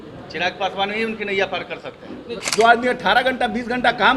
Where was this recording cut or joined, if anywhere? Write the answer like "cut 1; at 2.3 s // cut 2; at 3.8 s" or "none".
cut 1; at 2.4 s